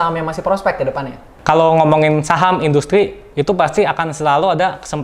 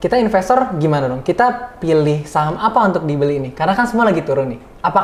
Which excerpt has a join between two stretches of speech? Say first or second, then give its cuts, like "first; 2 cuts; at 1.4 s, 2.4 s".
first; 1 cut; at 1.3 s